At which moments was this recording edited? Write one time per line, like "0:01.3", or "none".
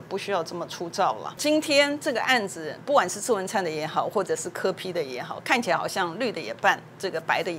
0:01.4